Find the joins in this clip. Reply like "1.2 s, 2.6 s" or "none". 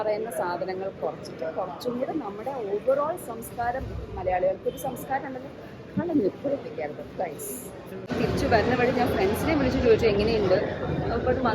7.9 s